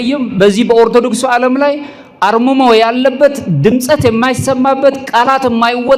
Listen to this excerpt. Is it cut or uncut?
uncut